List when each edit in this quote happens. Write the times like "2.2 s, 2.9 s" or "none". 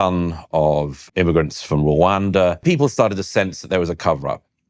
1.0 s, 2.6 s